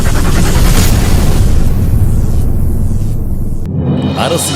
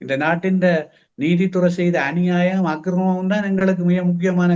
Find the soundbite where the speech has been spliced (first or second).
first